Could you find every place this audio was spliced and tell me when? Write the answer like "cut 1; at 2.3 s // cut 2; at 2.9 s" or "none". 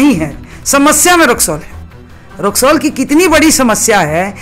none